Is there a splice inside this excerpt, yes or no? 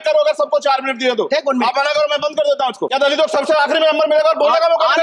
yes